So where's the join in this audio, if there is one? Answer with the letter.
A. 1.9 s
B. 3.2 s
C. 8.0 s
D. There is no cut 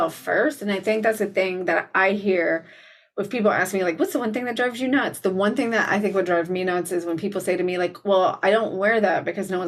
D